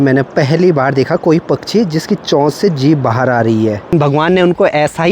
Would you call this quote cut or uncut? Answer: cut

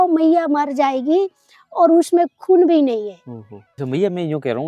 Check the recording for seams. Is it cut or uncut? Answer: cut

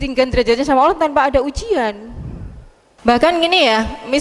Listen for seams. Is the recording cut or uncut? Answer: uncut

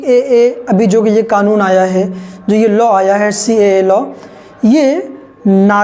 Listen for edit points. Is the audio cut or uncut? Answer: uncut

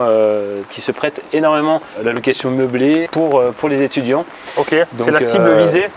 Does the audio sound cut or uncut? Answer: uncut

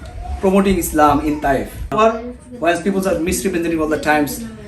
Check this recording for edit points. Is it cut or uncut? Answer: cut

